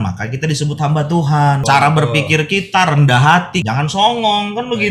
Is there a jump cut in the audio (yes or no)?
yes